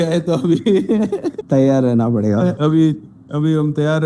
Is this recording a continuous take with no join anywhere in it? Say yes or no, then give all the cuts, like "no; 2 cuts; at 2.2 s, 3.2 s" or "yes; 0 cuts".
no; 2 cuts; at 1.3 s, 2.6 s